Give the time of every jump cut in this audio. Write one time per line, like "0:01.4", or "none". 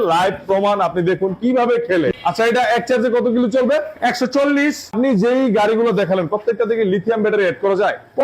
0:02.1
0:04.9